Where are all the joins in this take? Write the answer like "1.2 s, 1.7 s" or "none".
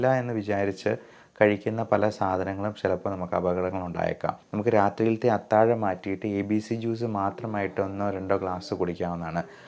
4.4 s